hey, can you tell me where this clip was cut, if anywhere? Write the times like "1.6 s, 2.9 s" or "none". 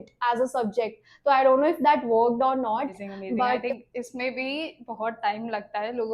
3.6 s

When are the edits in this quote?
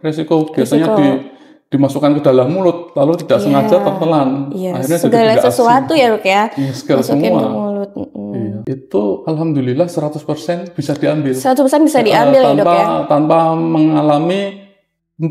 8.6 s

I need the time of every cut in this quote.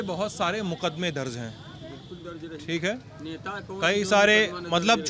none

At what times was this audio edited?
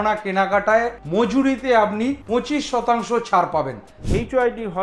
1.0 s, 2.2 s, 4.0 s

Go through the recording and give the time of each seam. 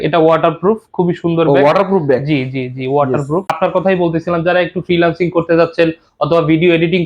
3.5 s

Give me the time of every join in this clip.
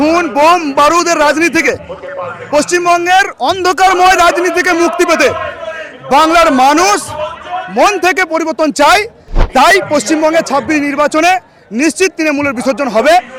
none

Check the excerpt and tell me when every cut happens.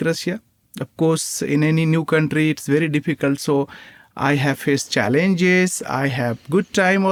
none

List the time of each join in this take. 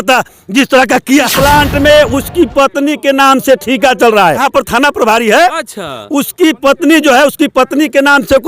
1.3 s, 4.4 s

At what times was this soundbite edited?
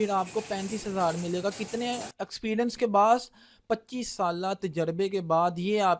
none

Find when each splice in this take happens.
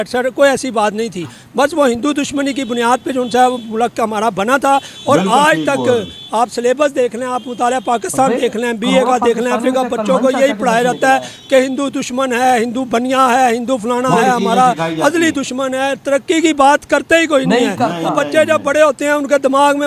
none

